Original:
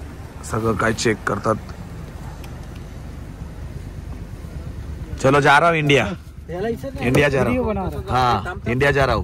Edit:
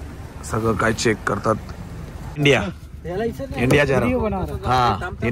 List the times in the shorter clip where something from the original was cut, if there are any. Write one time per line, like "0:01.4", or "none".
0:02.4